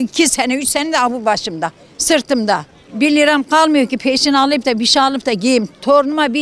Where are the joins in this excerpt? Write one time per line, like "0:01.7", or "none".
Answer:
none